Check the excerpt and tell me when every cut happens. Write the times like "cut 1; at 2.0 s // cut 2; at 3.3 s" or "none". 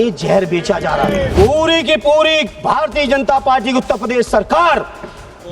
cut 1; at 1.3 s